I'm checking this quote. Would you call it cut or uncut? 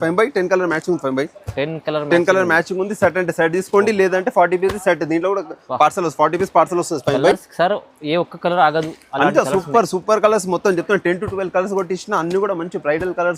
uncut